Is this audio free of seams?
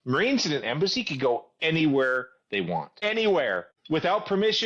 no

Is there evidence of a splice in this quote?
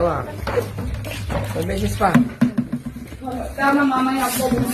no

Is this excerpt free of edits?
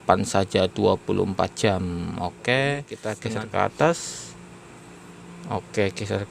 no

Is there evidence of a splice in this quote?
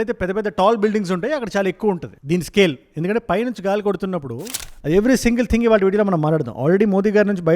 yes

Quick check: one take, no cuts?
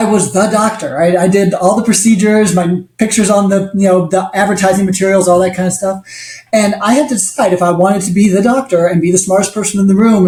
yes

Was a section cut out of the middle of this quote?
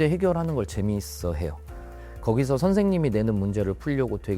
yes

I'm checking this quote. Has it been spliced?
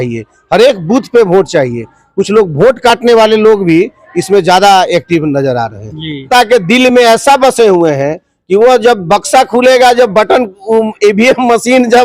yes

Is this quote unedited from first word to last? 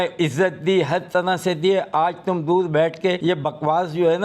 no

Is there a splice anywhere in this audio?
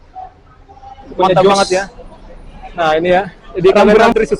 yes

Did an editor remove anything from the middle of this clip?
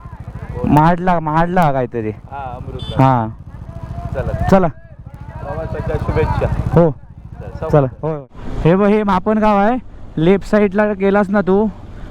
yes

